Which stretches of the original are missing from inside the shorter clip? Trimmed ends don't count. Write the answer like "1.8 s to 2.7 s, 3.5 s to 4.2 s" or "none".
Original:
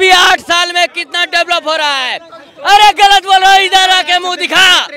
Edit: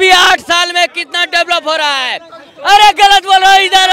none